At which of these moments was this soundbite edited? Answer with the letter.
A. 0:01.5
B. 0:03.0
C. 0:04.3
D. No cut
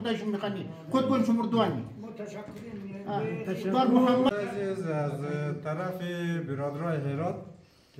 C